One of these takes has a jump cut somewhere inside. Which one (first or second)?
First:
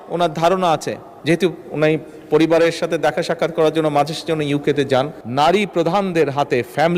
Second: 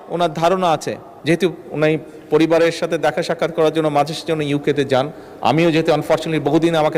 first